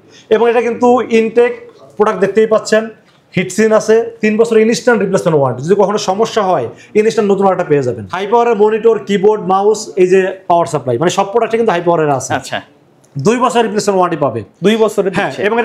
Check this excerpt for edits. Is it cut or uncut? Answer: cut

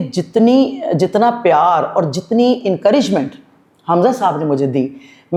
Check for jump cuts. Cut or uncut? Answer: uncut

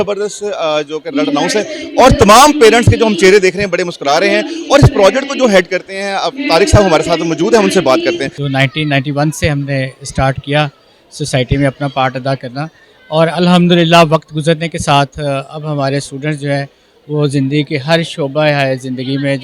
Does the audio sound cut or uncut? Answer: cut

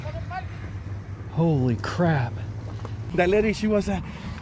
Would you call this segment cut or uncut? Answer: cut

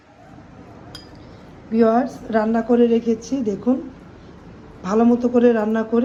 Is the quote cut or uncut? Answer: uncut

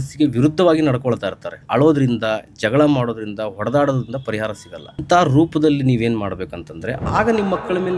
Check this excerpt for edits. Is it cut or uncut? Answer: cut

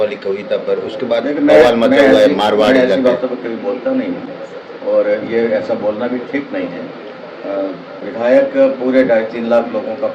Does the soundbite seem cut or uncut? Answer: uncut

